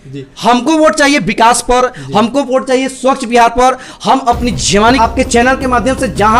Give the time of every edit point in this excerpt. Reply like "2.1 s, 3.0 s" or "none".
5.0 s